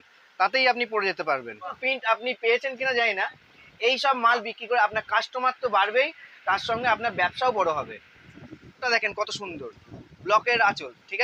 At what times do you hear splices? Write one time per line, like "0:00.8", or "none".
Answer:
0:01.8
0:08.9